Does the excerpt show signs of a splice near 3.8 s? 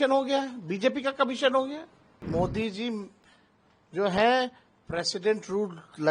no; 1 cut; at 2.2 s

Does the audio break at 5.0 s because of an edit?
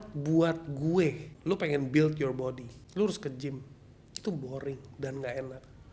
no; 2 cuts; at 1.3 s, 2.7 s

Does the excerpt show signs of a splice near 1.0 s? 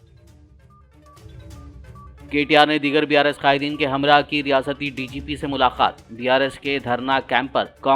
yes; 1 cut; at 1.0 s

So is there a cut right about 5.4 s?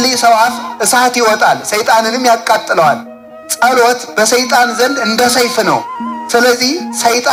no; 0 cuts

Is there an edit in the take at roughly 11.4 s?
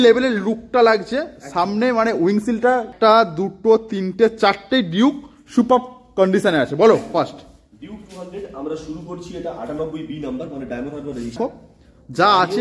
yes; 2 cuts; at 2.9 s, 11.4 s

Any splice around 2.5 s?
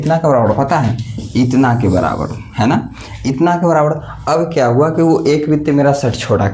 no; 0 cuts

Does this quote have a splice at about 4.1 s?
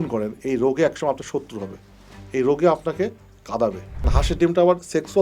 yes; 1 cut; at 4.1 s

